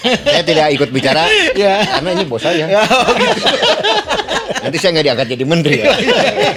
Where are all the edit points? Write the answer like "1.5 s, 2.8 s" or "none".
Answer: none